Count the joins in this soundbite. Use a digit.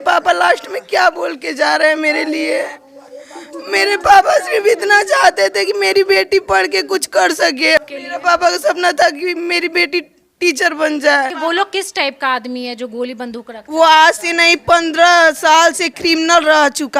2